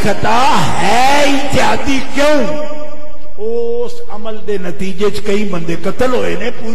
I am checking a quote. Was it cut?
no; 0 cuts

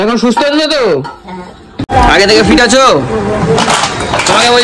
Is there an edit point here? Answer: yes; 1 cut; at 1.9 s

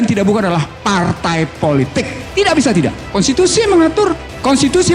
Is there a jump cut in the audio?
no; 0 cuts

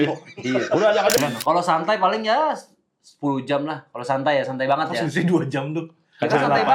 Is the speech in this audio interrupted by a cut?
yes; 1 cut; at 1.2 s

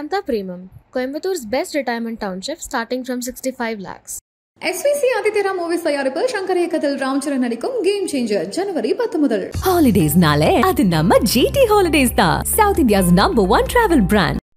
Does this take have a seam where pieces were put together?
no; 0 cuts

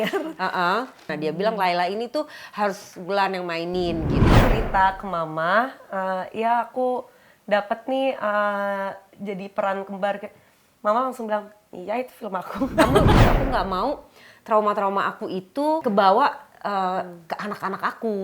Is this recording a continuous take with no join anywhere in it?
no; 4 cuts; at 1.1 s, 4.4 s, 13.1 s, 15.8 s

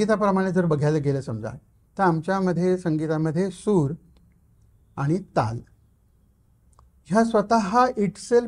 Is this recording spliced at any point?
no; 0 cuts

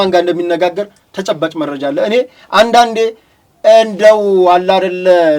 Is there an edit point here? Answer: no; 0 cuts

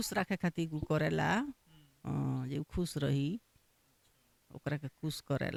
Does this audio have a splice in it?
no; 0 cuts

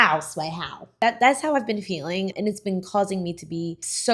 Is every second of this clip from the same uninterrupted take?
no; 2 cuts; at 0.9 s, 2.3 s

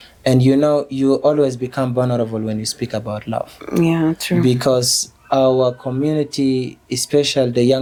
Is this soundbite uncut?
yes; 0 cuts

